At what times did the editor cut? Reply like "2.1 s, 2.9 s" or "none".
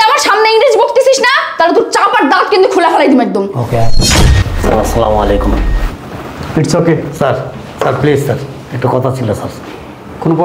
4.2 s